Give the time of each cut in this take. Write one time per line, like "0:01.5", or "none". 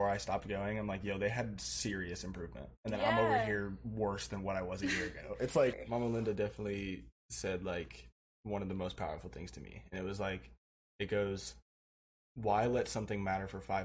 0:05.8